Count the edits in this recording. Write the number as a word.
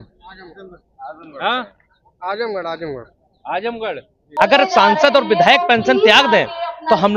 one